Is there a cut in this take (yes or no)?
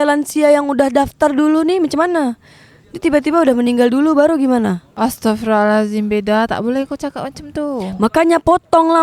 no